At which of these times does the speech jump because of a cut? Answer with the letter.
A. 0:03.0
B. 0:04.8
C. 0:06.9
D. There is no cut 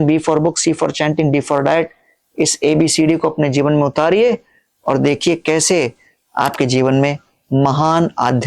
D